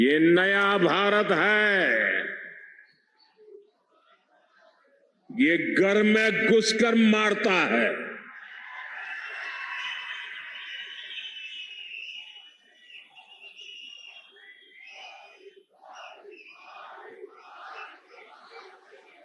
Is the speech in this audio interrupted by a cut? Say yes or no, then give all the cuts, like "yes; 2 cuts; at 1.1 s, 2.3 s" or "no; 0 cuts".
no; 0 cuts